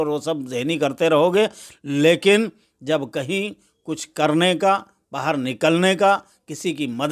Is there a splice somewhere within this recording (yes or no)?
no